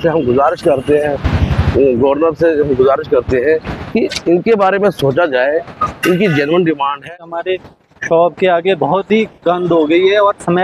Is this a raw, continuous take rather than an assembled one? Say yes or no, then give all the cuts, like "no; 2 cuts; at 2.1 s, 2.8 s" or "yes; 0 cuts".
no; 1 cut; at 7.0 s